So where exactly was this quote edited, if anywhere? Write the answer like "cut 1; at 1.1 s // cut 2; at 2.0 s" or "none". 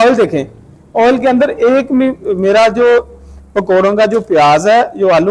none